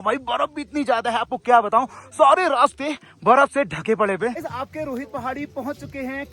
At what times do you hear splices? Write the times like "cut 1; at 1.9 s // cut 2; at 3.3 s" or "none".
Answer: none